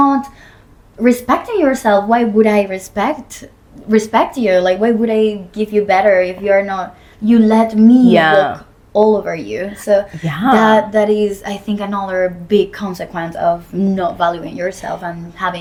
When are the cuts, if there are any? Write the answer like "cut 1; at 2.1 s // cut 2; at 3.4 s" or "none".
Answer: none